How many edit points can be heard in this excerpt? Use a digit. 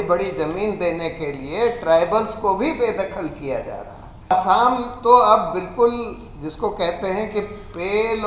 1